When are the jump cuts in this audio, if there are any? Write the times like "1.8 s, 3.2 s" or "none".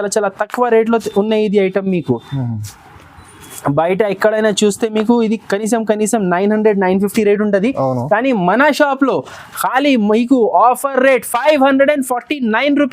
none